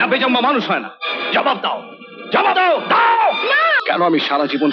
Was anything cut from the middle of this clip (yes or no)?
yes